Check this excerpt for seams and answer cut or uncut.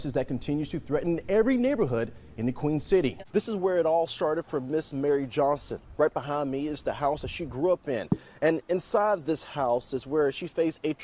cut